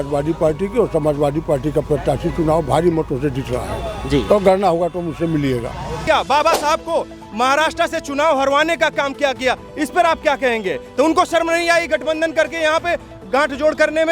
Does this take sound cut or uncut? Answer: cut